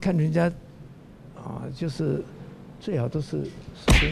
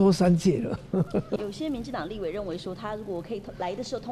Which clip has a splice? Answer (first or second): second